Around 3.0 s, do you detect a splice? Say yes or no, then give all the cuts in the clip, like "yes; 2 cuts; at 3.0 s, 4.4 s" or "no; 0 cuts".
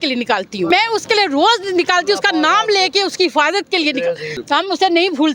no; 2 cuts; at 0.7 s, 4.3 s